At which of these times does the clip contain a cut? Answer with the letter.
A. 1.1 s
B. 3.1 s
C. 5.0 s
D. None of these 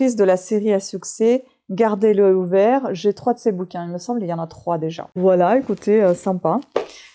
C